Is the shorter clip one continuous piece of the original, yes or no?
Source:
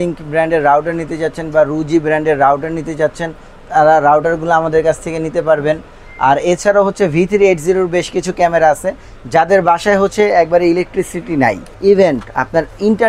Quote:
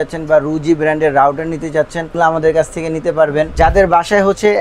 no